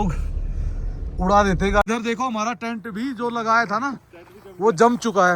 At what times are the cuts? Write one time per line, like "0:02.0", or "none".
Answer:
0:01.9